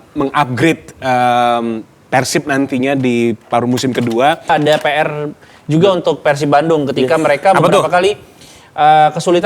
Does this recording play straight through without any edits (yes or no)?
no